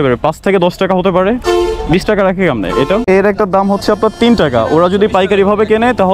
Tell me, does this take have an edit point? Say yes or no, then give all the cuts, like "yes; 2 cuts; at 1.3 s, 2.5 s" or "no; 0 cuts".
yes; 1 cut; at 3.0 s